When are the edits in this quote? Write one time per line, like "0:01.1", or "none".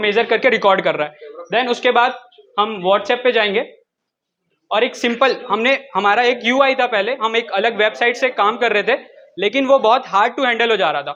none